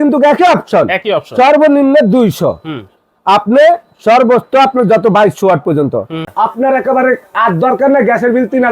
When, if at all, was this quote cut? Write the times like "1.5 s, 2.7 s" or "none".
6.2 s